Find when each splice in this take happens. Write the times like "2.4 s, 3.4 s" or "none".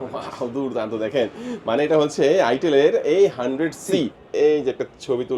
4.2 s